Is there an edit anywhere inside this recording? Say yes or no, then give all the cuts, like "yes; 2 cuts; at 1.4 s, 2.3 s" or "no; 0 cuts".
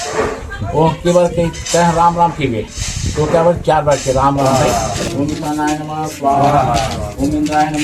yes; 1 cut; at 4.5 s